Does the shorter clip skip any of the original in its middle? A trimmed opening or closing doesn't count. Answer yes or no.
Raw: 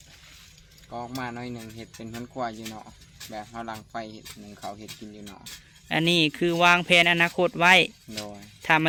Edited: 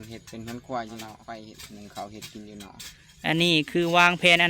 yes